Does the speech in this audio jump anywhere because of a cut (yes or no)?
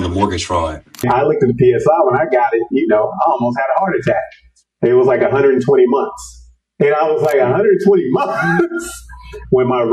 yes